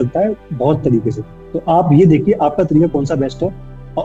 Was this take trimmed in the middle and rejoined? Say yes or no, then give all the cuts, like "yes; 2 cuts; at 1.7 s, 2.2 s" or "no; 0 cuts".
no; 0 cuts